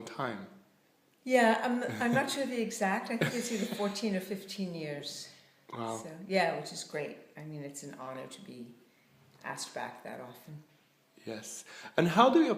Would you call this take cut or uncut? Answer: cut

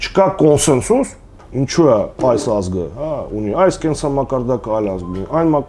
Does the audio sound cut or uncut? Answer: uncut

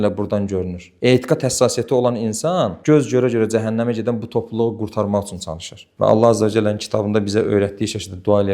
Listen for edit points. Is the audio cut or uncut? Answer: cut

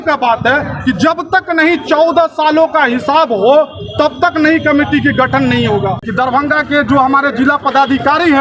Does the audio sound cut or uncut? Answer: cut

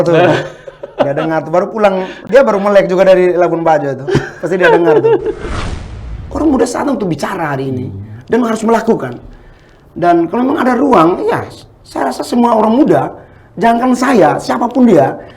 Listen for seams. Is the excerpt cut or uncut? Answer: cut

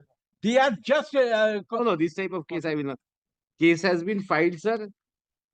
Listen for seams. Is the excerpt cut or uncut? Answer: uncut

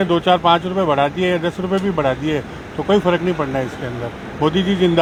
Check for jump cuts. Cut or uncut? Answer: uncut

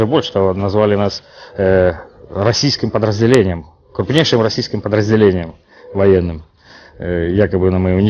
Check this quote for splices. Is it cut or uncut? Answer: cut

